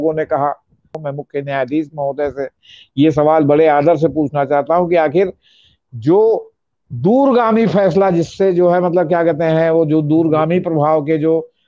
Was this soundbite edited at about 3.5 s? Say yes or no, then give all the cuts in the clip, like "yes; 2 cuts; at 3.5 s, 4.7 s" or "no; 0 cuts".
no; 1 cut; at 1.0 s